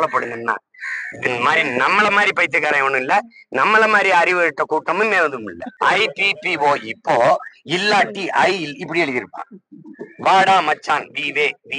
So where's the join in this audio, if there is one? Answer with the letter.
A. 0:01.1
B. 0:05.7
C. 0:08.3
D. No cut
B